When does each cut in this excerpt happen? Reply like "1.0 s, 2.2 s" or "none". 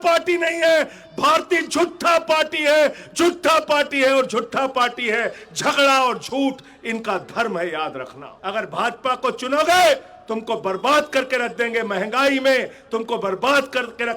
8.3 s